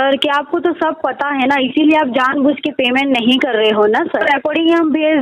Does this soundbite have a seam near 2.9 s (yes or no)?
no